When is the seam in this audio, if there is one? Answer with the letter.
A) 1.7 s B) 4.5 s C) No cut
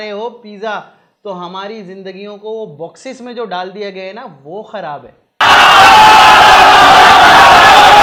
C